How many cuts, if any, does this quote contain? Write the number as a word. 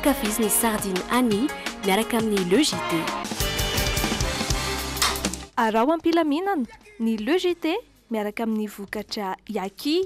zero